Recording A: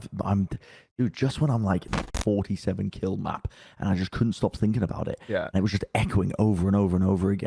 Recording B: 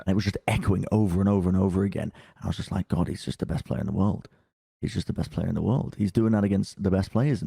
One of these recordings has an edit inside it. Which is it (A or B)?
A